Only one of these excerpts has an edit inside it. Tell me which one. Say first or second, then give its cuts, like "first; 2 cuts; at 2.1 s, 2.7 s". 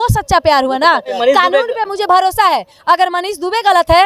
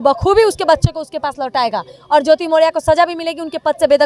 first; 1 cut; at 1.1 s